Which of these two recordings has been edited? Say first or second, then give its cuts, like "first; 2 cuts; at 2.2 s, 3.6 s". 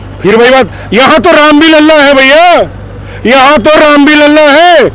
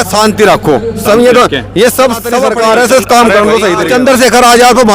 second; 2 cuts; at 2.5 s, 3.8 s